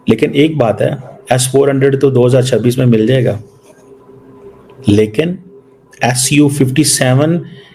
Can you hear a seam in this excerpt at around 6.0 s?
no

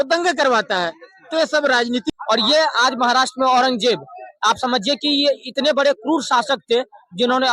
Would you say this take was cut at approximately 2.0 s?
yes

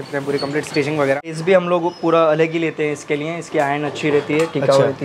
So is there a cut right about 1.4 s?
yes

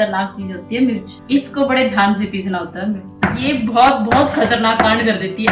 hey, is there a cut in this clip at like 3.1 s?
yes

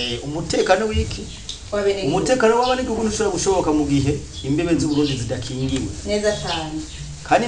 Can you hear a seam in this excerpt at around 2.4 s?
no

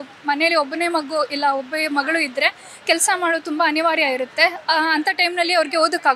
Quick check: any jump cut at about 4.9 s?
no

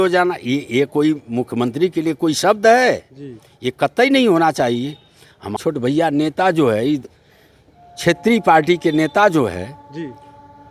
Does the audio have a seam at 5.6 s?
yes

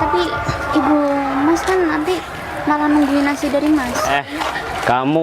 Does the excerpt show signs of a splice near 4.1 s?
yes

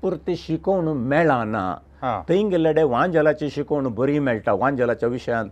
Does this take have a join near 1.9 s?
no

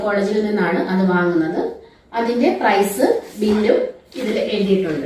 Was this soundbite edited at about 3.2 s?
no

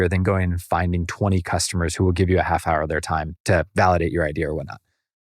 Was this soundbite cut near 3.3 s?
yes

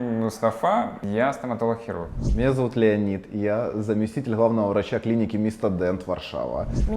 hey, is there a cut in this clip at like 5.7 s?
no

